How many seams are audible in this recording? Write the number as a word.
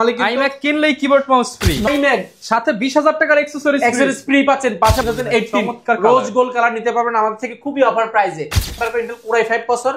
three